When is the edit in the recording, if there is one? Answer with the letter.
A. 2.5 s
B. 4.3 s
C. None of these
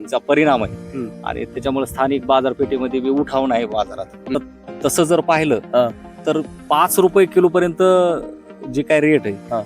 B